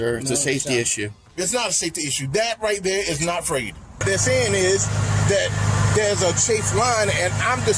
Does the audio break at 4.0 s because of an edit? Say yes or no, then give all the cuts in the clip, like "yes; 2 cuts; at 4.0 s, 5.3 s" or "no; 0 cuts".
yes; 1 cut; at 4.0 s